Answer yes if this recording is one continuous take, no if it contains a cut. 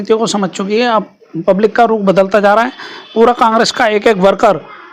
yes